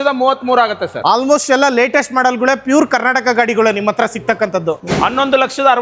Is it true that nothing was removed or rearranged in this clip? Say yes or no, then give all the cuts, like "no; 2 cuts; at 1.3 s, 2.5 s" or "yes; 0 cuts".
no; 2 cuts; at 0.9 s, 4.8 s